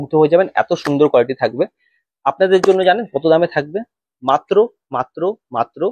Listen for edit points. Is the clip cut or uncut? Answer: uncut